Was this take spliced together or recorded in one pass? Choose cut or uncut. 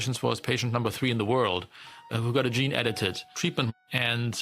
cut